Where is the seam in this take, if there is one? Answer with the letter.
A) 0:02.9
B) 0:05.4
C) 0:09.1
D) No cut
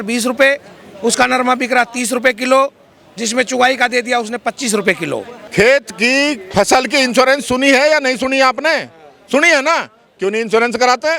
B